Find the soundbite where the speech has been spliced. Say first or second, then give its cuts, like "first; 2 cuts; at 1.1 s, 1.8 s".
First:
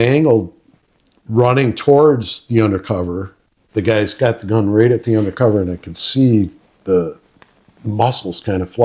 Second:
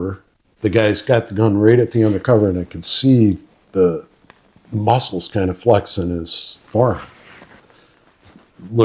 second; 1 cut; at 7.6 s